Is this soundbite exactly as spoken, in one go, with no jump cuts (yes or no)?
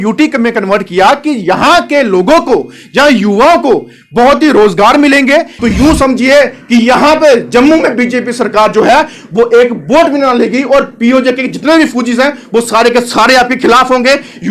no